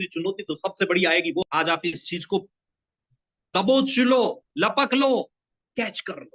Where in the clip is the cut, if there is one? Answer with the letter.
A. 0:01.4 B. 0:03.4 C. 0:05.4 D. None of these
A